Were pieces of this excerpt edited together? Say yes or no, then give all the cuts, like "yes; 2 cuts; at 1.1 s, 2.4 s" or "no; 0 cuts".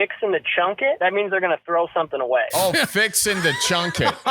yes; 2 cuts; at 1.0 s, 2.5 s